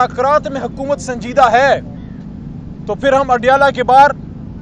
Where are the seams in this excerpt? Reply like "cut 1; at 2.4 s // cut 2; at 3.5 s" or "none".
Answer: none